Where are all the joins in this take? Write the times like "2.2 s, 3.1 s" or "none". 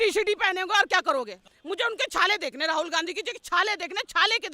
1.5 s